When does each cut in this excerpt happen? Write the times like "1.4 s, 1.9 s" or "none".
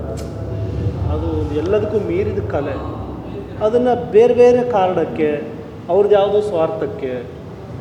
none